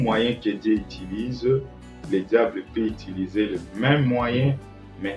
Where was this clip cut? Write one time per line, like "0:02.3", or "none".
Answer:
none